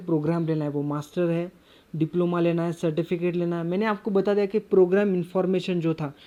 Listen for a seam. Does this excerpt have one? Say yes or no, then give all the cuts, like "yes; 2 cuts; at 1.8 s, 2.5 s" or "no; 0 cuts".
no; 0 cuts